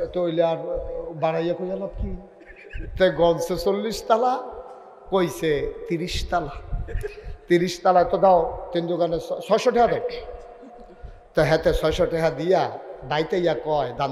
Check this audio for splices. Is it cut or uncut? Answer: uncut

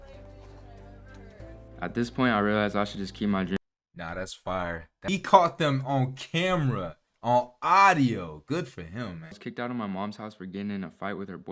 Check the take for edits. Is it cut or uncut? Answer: cut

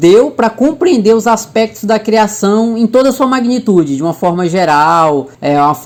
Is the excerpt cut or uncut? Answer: uncut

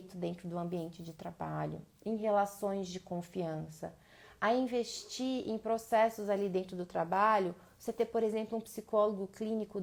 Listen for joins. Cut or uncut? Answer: uncut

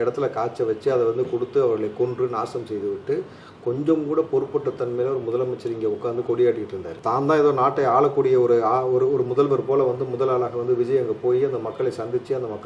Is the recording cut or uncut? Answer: uncut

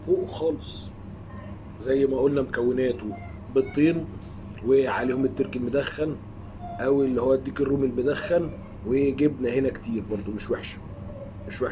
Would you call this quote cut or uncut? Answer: cut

